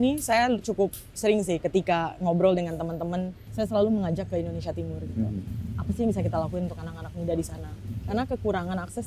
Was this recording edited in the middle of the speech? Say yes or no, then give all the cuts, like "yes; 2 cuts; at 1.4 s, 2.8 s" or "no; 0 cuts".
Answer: yes; 1 cut; at 3.4 s